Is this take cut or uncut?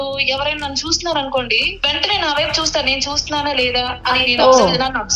cut